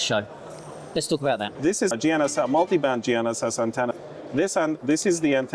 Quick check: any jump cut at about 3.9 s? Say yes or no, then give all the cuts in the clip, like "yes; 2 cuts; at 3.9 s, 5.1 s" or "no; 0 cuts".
yes; 2 cuts; at 1.7 s, 3.9 s